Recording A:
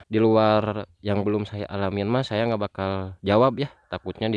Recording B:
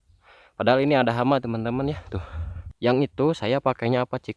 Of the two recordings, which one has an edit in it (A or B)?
B